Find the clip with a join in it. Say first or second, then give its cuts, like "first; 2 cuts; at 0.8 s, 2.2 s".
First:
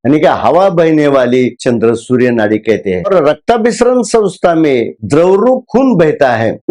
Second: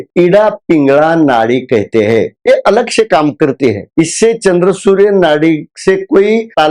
first; 3 cuts; at 1.6 s, 3.1 s, 4.9 s